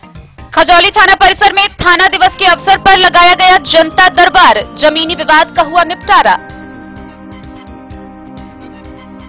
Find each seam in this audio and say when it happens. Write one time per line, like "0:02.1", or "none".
none

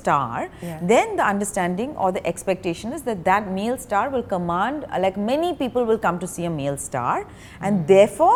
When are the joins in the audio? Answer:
none

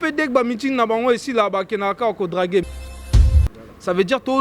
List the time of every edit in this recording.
0:03.3

